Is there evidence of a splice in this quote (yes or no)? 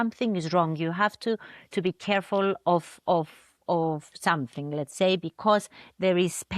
no